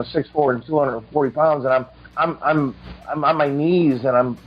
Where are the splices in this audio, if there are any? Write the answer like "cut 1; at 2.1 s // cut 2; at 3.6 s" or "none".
cut 1; at 2.0 s